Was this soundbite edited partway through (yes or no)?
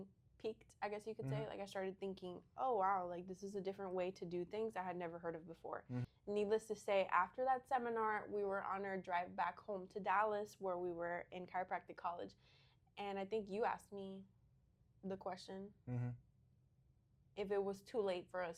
no